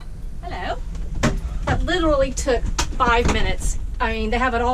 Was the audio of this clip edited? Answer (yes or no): no